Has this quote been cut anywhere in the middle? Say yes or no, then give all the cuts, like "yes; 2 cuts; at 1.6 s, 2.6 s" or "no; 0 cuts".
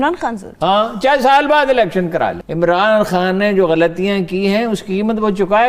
yes; 1 cut; at 2.4 s